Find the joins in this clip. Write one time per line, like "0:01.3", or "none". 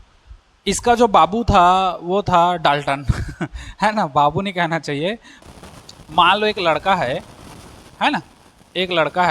0:05.3